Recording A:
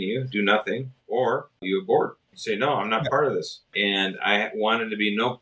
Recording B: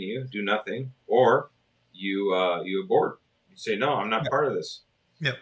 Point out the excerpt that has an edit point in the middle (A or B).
A